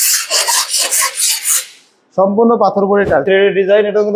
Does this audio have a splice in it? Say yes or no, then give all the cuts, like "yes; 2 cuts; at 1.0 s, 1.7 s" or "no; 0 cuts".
yes; 1 cut; at 3.2 s